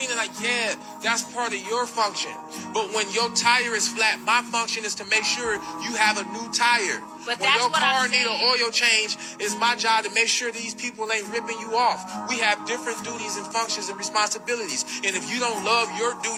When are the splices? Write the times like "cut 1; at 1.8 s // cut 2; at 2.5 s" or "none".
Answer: none